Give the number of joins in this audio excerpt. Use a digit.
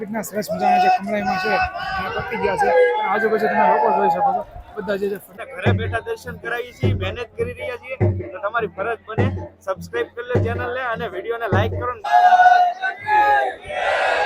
2